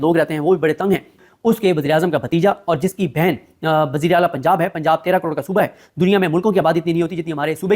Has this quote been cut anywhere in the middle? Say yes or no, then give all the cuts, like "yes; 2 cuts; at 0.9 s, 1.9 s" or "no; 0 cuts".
yes; 1 cut; at 1.3 s